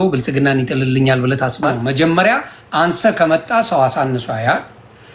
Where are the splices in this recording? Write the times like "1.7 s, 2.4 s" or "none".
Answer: 1.7 s